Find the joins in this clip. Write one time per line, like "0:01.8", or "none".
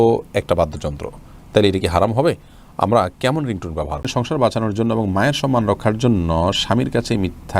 0:04.0